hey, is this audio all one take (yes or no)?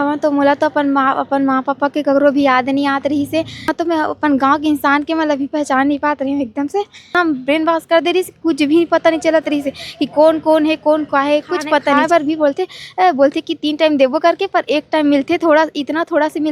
no